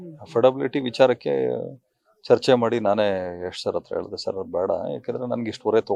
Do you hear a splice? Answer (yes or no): no